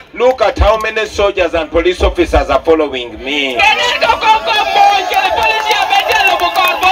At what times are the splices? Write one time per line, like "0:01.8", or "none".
0:05.6